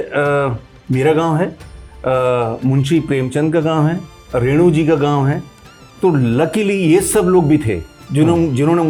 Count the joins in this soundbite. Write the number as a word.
zero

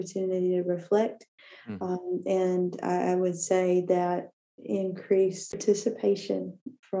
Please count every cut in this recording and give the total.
one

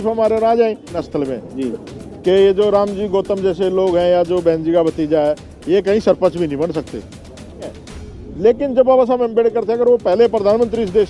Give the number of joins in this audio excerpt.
two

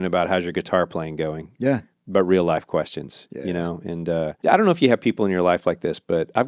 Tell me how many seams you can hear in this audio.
one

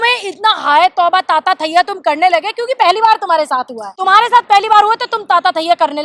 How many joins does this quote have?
one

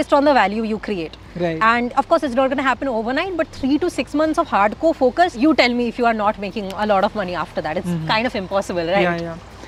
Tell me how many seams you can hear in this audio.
zero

